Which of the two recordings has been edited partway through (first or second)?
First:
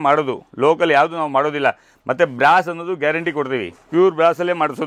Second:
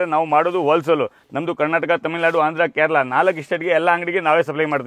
first